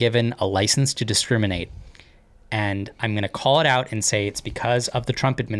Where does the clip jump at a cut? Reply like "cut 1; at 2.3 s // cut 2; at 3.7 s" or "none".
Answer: none